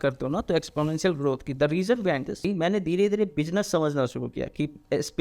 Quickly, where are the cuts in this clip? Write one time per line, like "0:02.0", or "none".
0:02.5